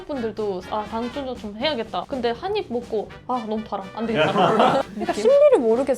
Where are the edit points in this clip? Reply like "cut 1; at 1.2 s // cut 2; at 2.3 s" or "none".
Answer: cut 1; at 4.8 s